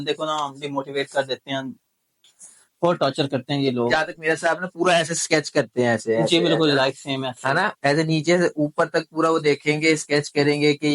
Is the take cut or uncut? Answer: cut